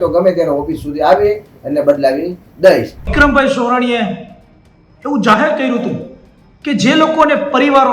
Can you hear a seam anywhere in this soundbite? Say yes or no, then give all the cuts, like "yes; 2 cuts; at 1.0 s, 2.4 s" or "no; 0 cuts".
yes; 1 cut; at 3.1 s